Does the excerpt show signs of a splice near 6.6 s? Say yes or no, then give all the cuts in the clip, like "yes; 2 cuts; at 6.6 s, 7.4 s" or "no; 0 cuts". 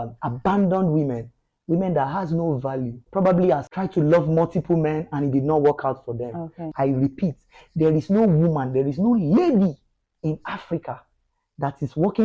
yes; 3 cuts; at 3.0 s, 3.7 s, 6.6 s